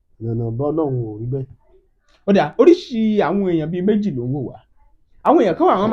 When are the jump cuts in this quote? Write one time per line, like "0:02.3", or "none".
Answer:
none